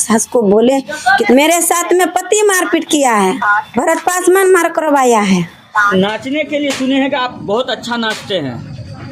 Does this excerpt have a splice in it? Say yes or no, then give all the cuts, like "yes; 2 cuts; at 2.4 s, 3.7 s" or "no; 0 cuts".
yes; 2 cuts; at 1.3 s, 5.9 s